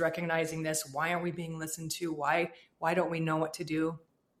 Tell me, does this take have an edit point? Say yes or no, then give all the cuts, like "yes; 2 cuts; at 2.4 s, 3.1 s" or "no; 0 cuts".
no; 0 cuts